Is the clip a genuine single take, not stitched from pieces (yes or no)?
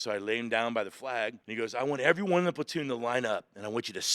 no